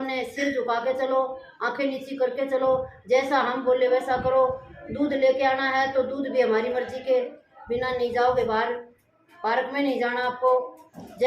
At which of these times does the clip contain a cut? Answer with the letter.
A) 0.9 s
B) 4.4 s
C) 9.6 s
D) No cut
D